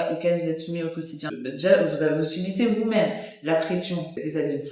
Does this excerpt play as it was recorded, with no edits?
no; 1 cut; at 1.3 s

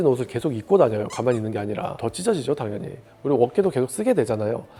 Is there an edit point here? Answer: no; 0 cuts

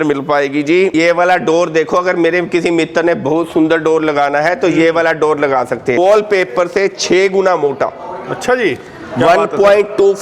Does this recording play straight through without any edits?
no; 2 cuts; at 0.9 s, 6.0 s

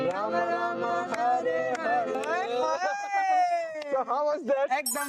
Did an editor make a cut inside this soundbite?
yes; 1 cut; at 2.2 s

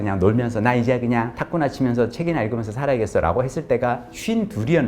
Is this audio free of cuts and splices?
no; 1 cut; at 1.4 s

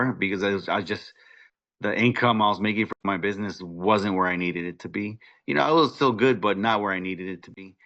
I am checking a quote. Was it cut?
no; 0 cuts

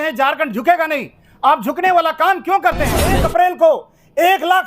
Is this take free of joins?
no; 1 cut; at 3.2 s

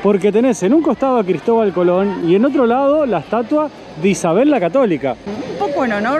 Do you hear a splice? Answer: no; 0 cuts

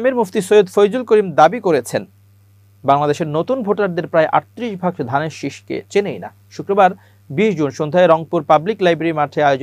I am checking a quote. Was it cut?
no; 0 cuts

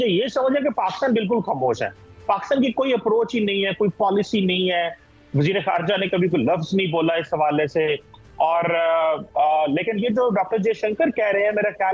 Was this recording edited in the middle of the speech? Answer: no; 0 cuts

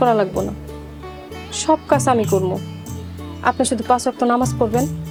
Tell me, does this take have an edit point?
no; 0 cuts

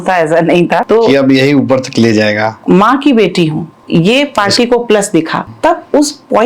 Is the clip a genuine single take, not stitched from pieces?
no; 4 cuts; at 0.8 s, 2.5 s, 3.7 s, 5.4 s

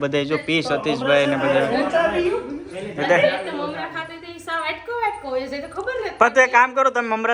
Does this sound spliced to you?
no; 0 cuts

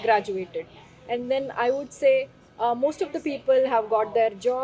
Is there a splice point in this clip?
no; 0 cuts

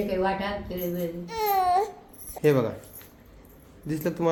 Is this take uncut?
yes; 0 cuts

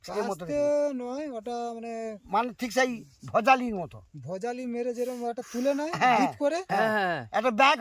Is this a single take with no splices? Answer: yes; 0 cuts

